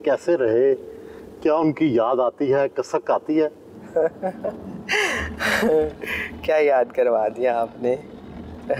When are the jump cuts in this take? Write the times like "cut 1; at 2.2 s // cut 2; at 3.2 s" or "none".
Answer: none